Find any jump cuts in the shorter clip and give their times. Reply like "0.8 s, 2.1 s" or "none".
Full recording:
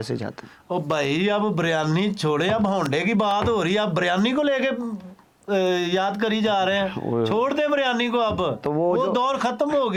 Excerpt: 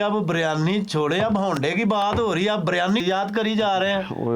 3.0 s